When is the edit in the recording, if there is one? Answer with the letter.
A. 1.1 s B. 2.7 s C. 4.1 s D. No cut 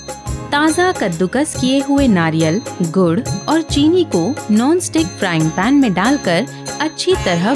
D